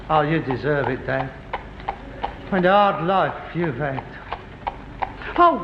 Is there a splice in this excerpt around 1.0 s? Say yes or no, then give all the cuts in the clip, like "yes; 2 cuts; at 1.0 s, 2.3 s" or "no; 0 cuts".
yes; 1 cut; at 1.0 s